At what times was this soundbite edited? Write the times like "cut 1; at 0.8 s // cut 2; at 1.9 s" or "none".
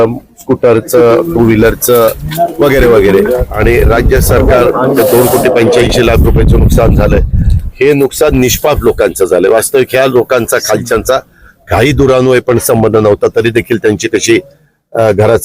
cut 1; at 3.4 s